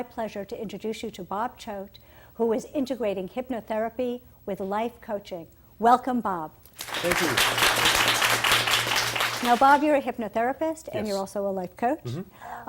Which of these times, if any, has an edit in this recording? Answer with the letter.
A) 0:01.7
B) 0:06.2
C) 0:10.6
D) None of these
C